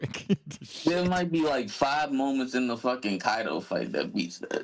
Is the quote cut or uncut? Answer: uncut